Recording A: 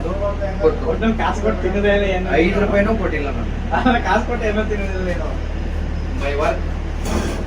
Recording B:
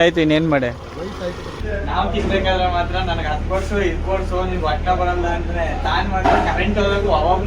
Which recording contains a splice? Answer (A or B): B